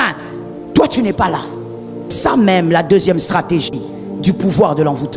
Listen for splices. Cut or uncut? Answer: uncut